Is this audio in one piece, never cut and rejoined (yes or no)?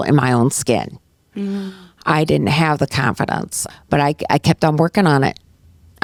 yes